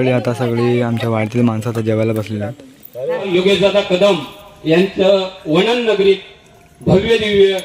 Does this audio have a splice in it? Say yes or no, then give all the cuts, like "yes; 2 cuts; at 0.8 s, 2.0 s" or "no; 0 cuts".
yes; 1 cut; at 3.3 s